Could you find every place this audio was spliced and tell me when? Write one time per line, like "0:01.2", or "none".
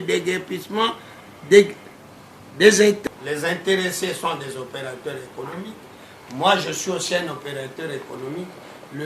0:03.0